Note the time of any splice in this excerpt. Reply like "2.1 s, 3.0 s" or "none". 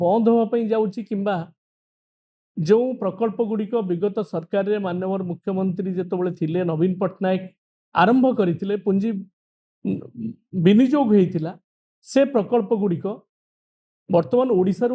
none